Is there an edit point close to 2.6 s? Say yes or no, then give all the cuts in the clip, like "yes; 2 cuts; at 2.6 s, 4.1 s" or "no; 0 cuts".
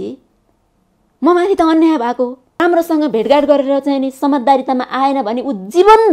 yes; 1 cut; at 2.6 s